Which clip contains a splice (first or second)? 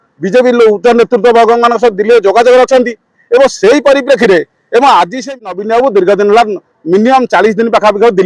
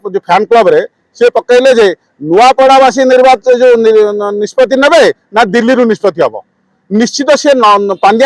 first